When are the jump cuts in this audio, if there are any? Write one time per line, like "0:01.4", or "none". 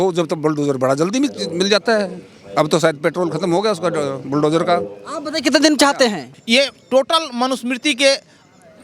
0:06.3